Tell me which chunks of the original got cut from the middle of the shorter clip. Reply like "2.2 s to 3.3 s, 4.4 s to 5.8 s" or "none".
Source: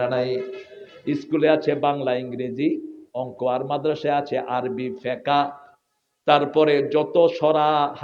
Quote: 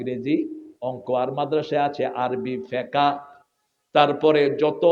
none